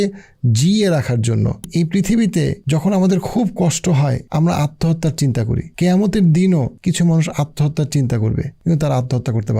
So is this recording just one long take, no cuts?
no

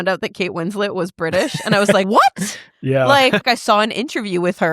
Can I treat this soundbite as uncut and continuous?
no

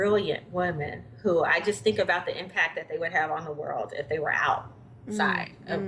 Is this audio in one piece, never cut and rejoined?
yes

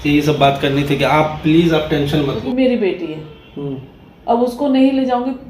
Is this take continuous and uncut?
no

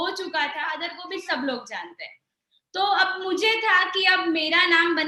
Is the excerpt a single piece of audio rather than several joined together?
no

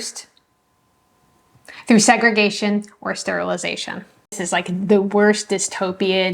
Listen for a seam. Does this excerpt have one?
yes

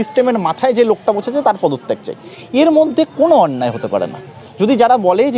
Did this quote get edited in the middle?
no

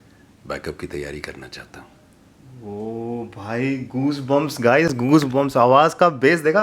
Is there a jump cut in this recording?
no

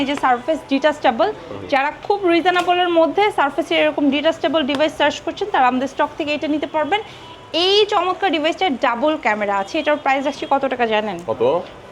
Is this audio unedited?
yes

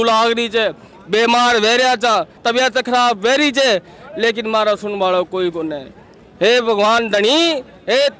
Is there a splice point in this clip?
yes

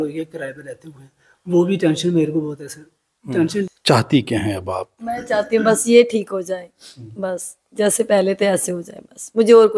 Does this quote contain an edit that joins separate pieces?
yes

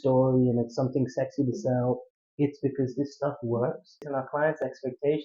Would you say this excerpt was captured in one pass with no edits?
no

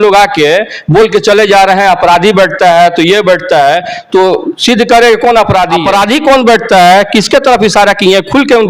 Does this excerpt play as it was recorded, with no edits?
no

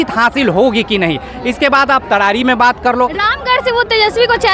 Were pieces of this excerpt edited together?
no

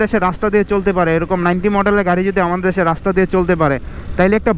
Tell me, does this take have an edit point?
no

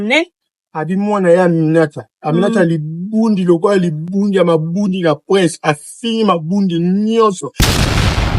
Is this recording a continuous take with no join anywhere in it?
no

